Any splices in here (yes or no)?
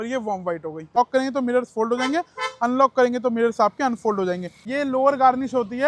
yes